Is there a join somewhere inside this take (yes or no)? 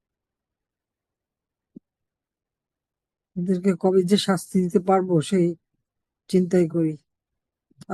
no